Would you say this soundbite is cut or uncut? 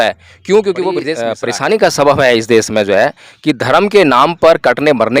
cut